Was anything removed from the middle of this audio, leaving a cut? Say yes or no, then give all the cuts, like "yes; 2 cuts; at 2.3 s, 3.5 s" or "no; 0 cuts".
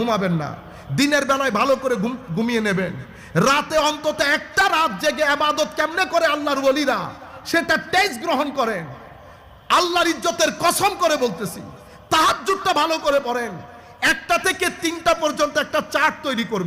no; 0 cuts